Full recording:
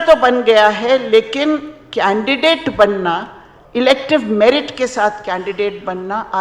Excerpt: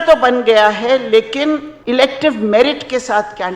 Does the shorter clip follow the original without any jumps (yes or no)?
no